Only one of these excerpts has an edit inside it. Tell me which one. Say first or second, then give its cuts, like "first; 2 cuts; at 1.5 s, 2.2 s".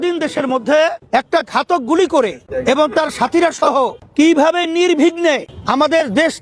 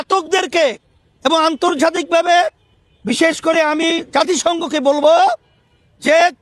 first; 4 cuts; at 1.0 s, 2.5 s, 4.0 s, 5.5 s